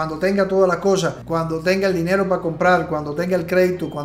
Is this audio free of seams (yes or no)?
yes